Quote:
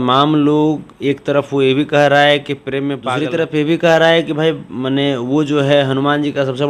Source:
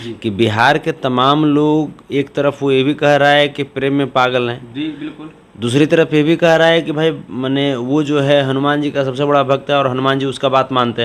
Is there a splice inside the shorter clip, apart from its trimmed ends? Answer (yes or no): yes